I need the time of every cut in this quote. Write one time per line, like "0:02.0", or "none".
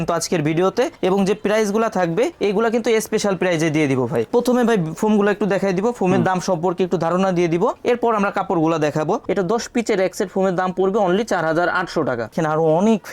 0:04.3
0:09.2
0:12.3